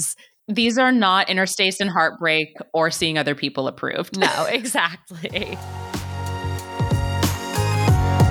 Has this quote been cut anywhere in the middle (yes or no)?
yes